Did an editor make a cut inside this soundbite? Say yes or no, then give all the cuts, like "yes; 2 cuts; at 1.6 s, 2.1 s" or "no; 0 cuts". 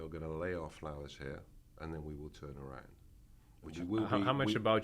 yes; 1 cut; at 3.6 s